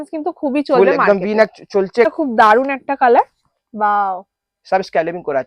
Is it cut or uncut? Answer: cut